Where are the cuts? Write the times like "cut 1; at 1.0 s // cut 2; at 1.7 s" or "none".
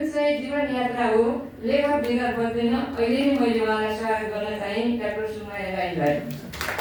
none

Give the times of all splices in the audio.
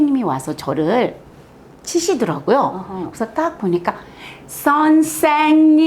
none

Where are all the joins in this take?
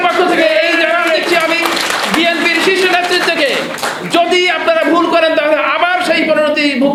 none

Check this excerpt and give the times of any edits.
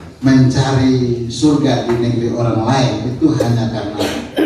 none

